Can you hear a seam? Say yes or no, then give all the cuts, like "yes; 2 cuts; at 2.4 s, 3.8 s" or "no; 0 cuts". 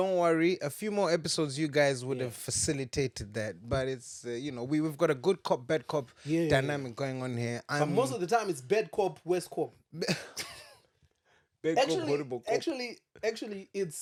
no; 0 cuts